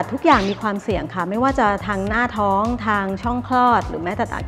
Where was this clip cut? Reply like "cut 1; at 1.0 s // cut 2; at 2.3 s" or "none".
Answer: none